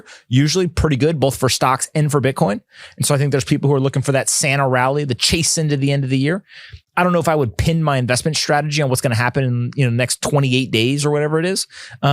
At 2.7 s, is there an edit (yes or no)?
no